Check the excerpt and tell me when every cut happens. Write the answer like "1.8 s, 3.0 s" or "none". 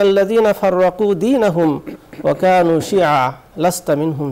none